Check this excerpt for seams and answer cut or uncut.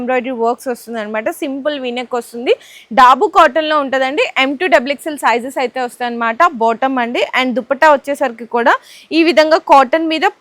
uncut